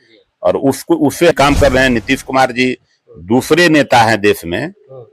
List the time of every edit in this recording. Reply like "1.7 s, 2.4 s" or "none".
1.3 s